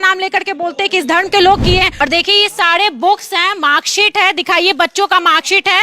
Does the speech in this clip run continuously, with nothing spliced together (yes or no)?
no